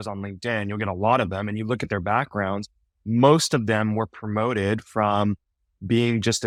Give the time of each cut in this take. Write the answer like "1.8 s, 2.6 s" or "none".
none